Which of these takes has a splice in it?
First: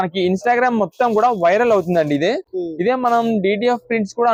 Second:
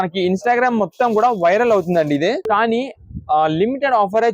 second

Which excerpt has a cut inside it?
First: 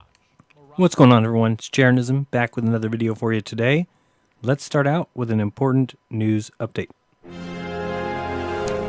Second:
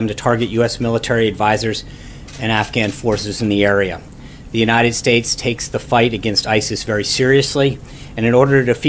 first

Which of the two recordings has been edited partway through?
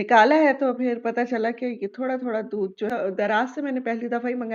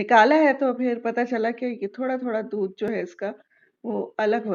first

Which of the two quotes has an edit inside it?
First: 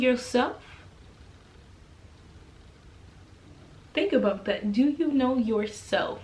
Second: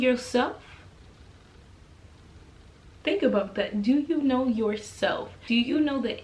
second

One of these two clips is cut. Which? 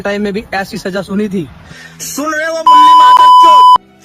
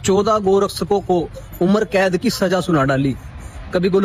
first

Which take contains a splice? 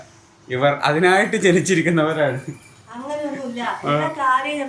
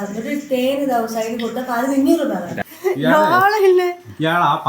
second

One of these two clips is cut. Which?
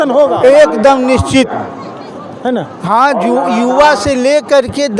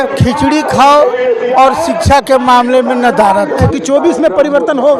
second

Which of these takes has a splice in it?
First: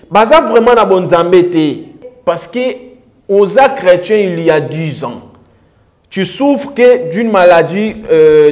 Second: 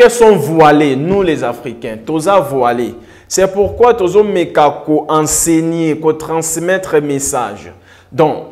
first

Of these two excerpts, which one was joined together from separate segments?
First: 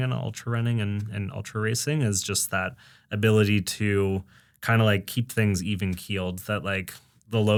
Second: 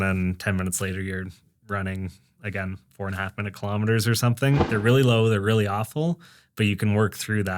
second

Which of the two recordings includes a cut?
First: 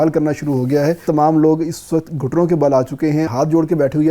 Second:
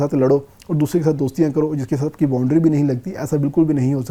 first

